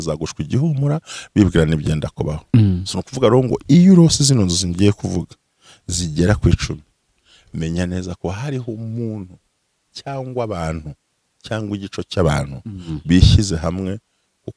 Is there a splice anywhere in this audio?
no; 0 cuts

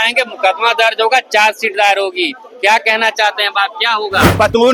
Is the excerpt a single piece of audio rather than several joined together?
yes; 0 cuts

